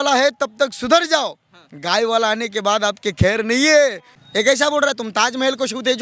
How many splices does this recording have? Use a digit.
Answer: 1